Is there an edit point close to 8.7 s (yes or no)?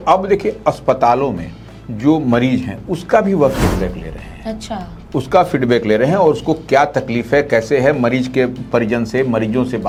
no